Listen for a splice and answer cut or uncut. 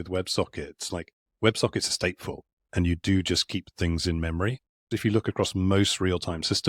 cut